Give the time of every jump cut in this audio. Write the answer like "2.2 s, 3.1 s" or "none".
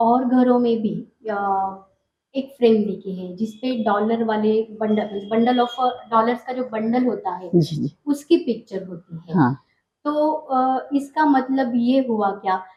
none